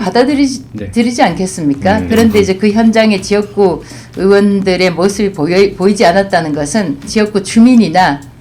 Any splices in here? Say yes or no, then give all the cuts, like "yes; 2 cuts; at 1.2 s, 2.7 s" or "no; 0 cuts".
yes; 1 cut; at 7.1 s